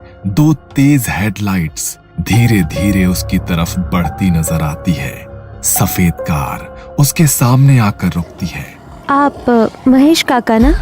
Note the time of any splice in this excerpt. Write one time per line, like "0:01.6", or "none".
0:08.9